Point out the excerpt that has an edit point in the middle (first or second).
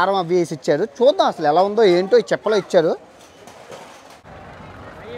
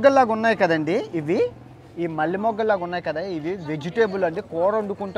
first